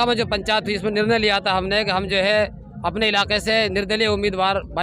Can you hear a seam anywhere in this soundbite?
no; 0 cuts

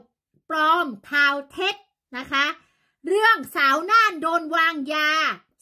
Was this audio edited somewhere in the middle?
no; 0 cuts

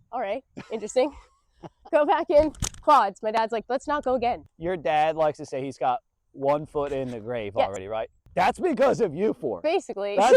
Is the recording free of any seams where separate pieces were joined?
no; 2 cuts; at 4.5 s, 7.8 s

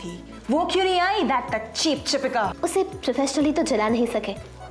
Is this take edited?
yes; 1 cut; at 2.5 s

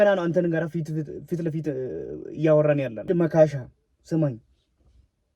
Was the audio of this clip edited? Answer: yes; 1 cut; at 3.0 s

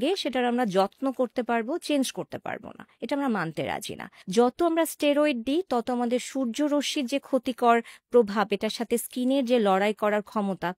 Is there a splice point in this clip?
yes; 1 cut; at 4.1 s

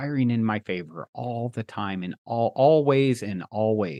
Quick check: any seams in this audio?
no; 0 cuts

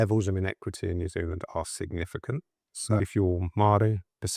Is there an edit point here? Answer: yes; 1 cut; at 3.0 s

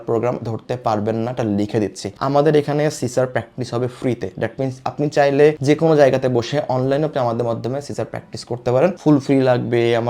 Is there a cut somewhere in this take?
yes; 2 cuts; at 2.2 s, 9.0 s

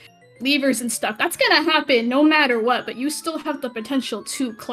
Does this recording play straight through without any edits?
yes; 0 cuts

